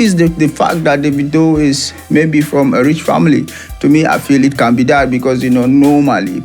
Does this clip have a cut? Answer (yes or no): no